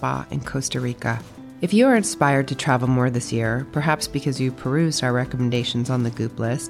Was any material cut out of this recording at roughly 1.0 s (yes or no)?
no